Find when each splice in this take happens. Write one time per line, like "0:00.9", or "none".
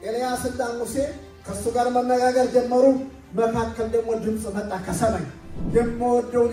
none